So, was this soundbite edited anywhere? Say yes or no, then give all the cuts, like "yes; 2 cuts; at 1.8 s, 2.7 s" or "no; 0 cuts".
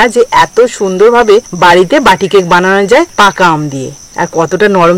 yes; 3 cuts; at 1.5 s, 3.1 s, 4.0 s